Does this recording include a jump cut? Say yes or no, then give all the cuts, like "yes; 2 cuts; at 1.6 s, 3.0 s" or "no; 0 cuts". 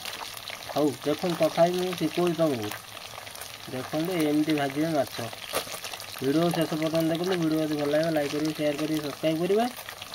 no; 0 cuts